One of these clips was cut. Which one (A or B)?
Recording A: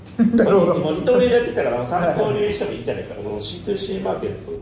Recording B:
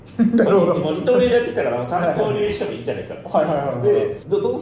A